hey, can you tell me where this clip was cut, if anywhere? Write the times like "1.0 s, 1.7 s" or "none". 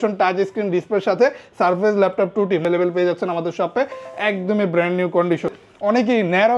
2.6 s, 5.5 s

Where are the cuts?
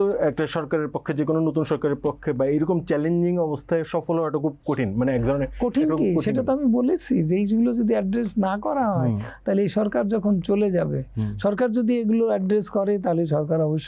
none

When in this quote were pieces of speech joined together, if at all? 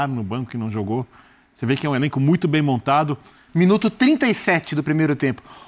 3.4 s

